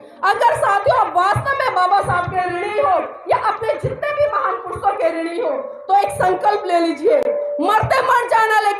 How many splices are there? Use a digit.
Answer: 0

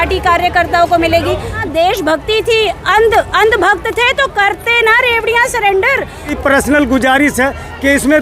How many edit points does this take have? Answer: 2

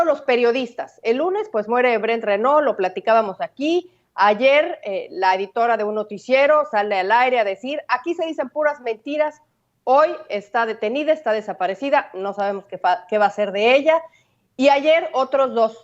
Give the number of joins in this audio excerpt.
0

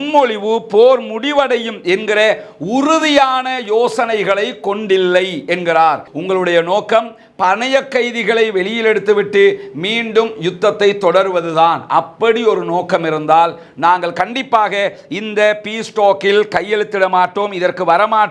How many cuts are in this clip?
1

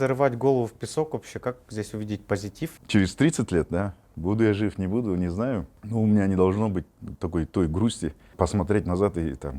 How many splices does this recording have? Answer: 3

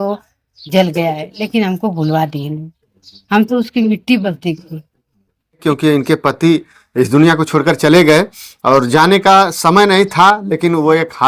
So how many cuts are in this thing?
1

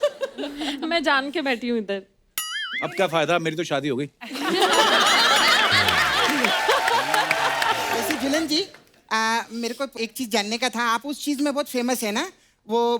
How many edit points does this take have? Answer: 1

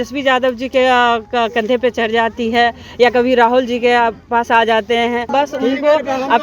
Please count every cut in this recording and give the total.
1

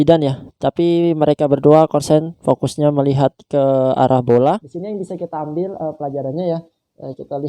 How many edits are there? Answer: 1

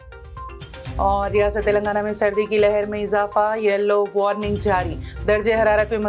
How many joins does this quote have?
1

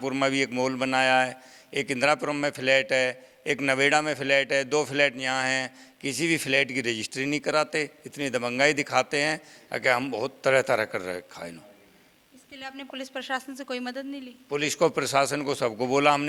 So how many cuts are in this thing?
0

